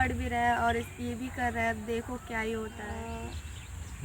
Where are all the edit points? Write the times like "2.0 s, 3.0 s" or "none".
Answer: 2.9 s